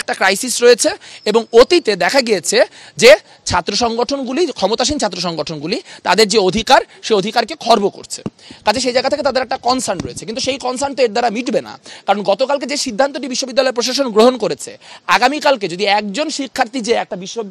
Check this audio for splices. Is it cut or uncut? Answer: uncut